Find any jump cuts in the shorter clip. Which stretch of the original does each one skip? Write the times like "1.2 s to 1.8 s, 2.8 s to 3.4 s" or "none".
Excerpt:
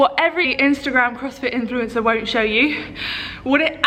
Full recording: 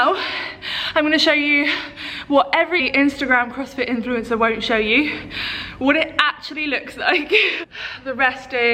none